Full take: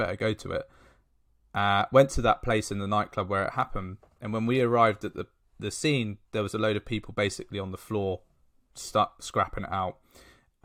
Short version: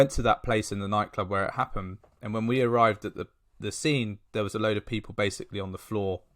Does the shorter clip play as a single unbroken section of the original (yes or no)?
yes